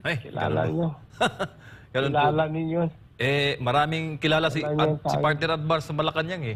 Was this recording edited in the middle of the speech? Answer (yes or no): no